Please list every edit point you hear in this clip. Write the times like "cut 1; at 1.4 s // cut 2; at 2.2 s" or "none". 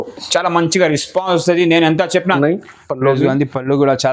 cut 1; at 2.4 s